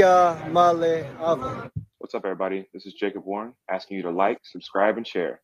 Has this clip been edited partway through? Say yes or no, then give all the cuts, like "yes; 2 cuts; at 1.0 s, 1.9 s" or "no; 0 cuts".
yes; 1 cut; at 1.7 s